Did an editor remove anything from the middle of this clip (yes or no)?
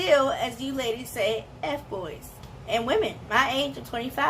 yes